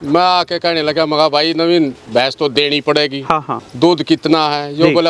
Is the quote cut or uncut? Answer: cut